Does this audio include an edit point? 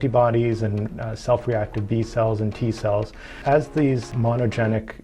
yes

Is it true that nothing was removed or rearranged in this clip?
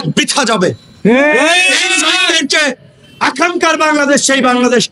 yes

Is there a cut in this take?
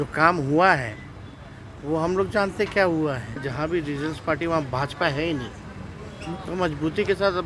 yes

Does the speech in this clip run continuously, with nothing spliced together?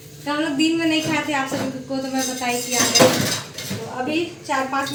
yes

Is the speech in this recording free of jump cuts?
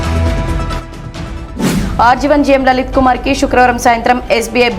no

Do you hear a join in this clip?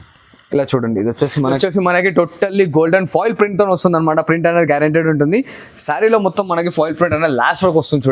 yes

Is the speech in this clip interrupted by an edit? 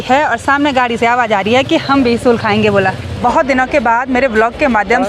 yes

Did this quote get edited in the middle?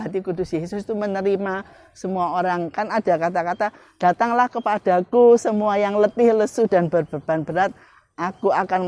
no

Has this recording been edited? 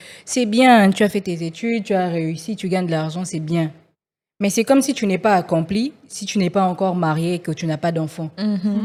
no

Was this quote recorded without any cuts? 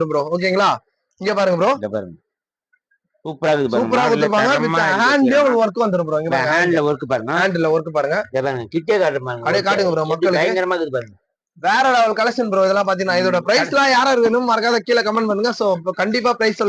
yes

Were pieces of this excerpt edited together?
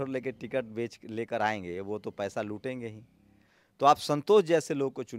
no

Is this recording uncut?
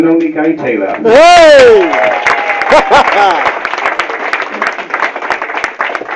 yes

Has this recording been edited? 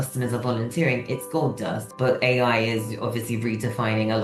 yes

